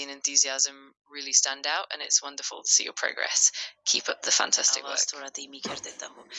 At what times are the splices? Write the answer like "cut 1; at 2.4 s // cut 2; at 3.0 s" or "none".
cut 1; at 4.8 s

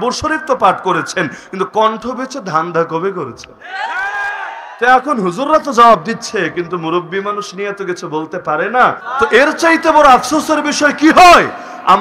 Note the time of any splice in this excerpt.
cut 1; at 9.0 s

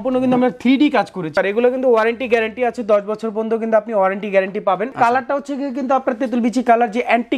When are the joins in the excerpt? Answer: cut 1; at 1.3 s // cut 2; at 4.9 s

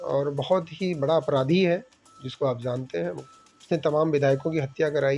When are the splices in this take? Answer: cut 1; at 3.2 s

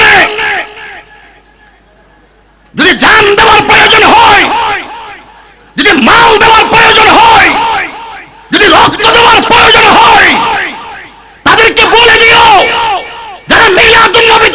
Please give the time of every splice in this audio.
none

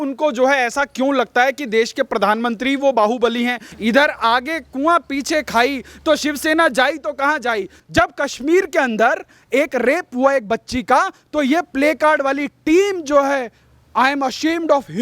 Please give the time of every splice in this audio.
cut 1; at 3.7 s // cut 2; at 7.7 s

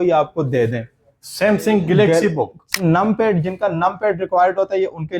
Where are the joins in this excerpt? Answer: cut 1; at 2.8 s

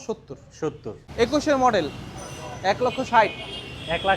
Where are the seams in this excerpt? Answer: cut 1; at 0.9 s

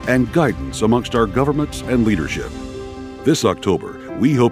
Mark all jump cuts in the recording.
none

